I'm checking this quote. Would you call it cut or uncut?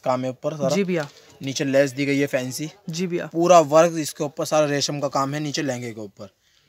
uncut